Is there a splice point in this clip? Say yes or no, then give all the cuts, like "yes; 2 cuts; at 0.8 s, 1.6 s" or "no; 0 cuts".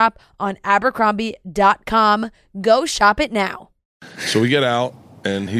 yes; 1 cut; at 3.8 s